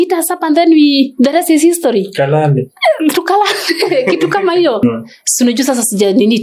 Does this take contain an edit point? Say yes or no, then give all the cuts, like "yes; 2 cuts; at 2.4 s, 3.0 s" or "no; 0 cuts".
yes; 1 cut; at 4.8 s